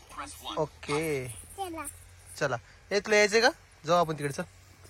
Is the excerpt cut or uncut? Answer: uncut